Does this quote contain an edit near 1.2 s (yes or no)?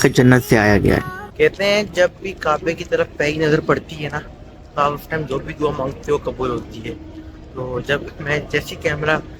yes